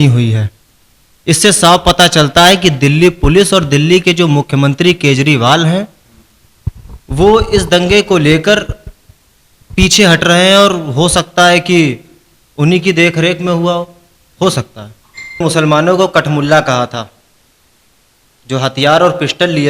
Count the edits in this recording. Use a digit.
1